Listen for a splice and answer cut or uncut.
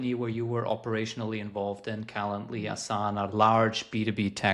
uncut